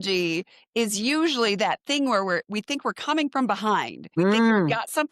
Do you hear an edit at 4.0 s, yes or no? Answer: yes